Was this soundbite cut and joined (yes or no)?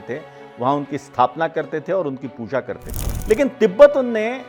yes